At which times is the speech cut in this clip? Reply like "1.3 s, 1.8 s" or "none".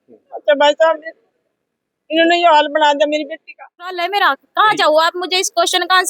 3.9 s